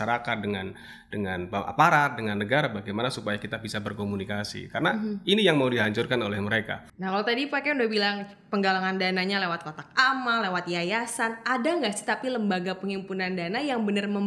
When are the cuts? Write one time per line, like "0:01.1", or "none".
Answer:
0:06.9